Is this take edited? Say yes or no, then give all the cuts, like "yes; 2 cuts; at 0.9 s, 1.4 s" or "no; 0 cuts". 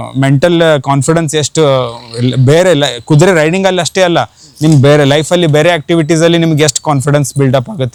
no; 0 cuts